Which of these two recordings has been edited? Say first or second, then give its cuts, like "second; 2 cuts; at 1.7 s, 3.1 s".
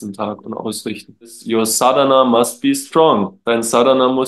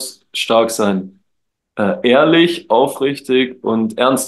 first; 2 cuts; at 1.4 s, 3.3 s